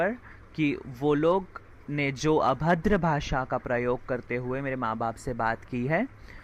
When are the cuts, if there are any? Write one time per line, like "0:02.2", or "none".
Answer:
none